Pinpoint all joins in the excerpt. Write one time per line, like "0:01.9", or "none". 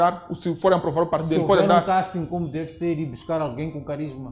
none